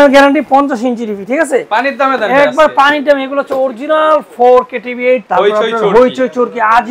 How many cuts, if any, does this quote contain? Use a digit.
1